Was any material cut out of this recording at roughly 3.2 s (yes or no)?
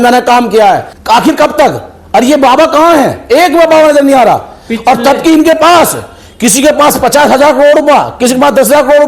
no